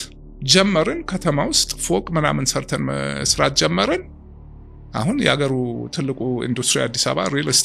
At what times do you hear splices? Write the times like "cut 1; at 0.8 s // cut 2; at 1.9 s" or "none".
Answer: none